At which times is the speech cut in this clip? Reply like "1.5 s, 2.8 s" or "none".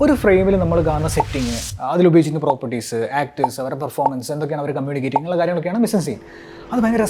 none